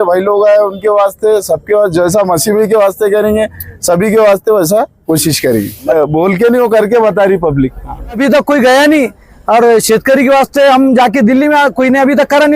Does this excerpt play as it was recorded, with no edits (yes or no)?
no